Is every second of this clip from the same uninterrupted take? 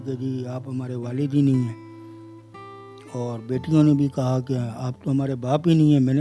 yes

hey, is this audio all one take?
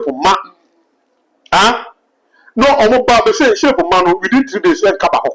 yes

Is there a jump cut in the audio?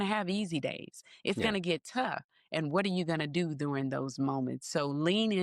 no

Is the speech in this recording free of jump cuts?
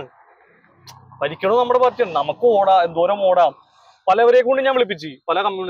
yes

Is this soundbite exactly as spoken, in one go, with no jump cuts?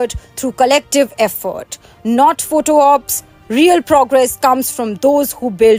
yes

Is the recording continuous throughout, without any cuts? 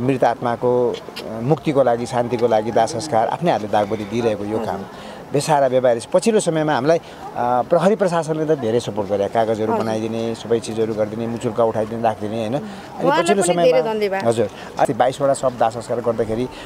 no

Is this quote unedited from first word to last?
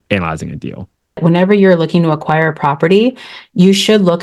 no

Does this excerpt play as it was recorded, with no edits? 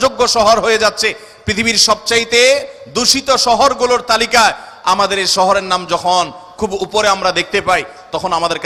yes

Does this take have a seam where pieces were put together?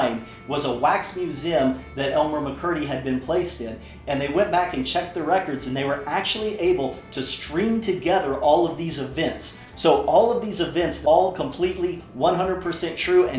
yes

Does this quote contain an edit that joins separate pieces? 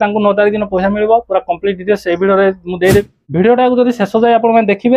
yes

